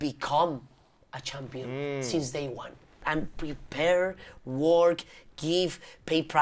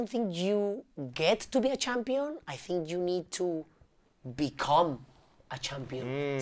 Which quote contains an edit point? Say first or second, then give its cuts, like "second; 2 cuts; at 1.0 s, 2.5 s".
first; 1 cut; at 3.0 s